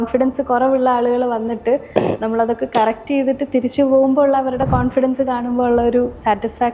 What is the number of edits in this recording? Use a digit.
0